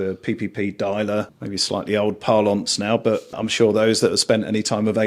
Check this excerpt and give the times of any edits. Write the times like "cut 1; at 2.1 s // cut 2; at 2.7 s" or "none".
cut 1; at 1.4 s // cut 2; at 3.4 s